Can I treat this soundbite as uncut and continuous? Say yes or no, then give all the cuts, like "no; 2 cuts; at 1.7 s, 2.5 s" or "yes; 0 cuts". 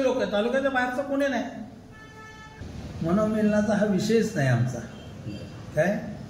no; 1 cut; at 2.5 s